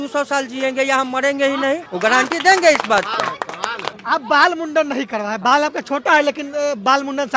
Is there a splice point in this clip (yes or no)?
no